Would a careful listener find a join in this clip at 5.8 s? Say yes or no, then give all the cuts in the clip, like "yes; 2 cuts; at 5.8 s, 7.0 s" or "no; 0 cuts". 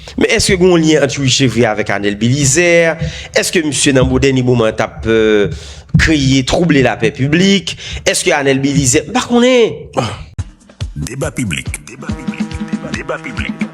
no; 1 cut; at 10.3 s